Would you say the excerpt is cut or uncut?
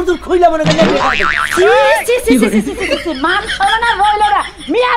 uncut